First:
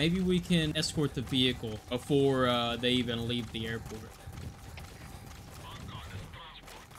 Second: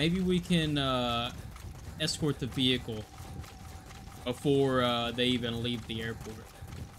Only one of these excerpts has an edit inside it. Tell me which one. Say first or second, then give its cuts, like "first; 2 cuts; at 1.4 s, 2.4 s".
first; 2 cuts; at 0.7 s, 1.8 s